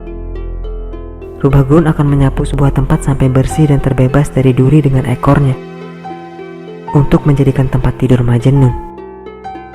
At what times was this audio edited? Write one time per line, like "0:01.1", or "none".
0:01.4